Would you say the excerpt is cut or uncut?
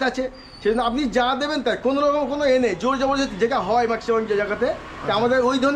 uncut